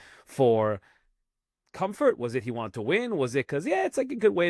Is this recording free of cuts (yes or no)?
yes